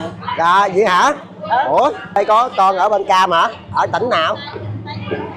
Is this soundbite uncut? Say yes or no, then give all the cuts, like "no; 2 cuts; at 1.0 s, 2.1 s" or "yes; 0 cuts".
no; 1 cut; at 2.2 s